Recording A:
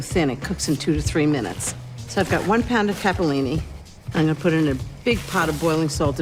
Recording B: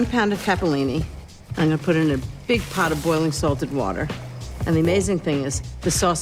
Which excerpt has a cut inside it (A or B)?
B